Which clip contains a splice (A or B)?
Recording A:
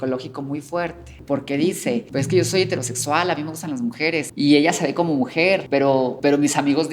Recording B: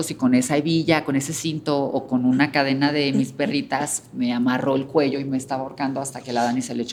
A